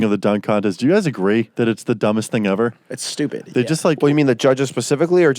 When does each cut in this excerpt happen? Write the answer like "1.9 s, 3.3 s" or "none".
1.5 s